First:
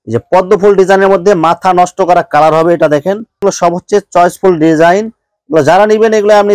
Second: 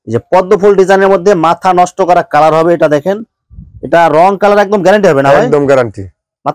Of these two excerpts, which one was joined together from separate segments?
first; 1 cut; at 3.4 s

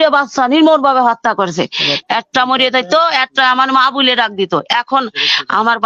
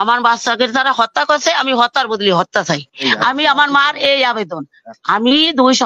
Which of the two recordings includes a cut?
second; 1 cut; at 2.9 s

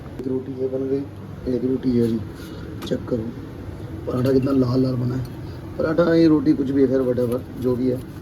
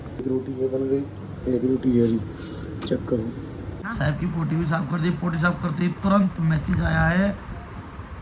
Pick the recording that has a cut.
second; 1 cut; at 3.8 s

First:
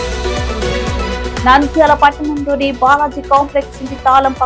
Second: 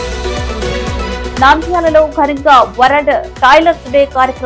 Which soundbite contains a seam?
second; 1 cut; at 1.3 s

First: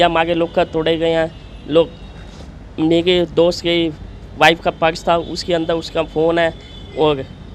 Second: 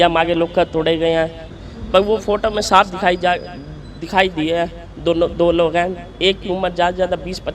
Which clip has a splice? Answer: second; 1 cut; at 1.5 s

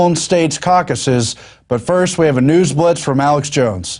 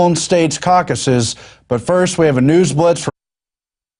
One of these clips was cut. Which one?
first; 1 cut; at 3.1 s

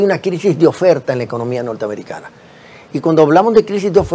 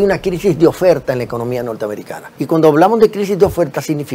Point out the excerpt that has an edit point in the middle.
second; 1 cut; at 2.2 s

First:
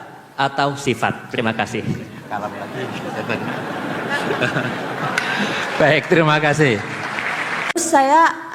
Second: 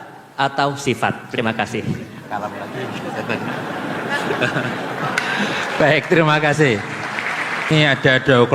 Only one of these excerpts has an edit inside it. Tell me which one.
first; 1 cut; at 7.6 s

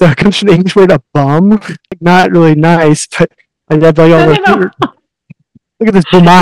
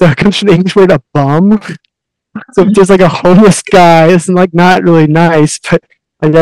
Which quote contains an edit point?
first; 1 cut; at 2.0 s

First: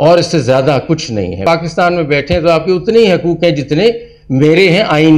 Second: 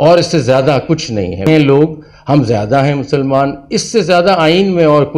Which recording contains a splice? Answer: first; 1 cut; at 1.4 s

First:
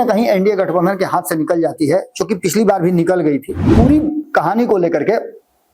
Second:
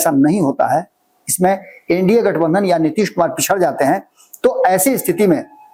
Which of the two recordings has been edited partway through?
first; 1 cut; at 3.7 s

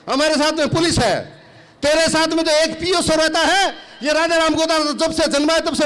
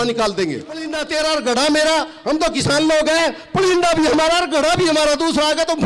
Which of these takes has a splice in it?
second; 1 cut; at 0.9 s

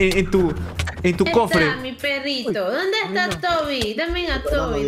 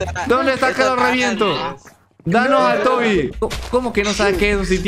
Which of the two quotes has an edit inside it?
second; 1 cut; at 3.3 s

